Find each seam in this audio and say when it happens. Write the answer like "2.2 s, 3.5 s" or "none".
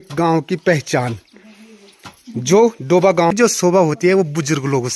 3.3 s